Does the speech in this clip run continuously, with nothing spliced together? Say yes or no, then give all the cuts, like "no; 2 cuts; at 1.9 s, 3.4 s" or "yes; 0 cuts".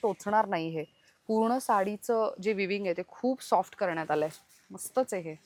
yes; 0 cuts